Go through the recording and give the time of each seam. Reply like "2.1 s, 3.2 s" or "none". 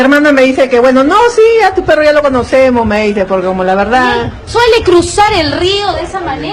none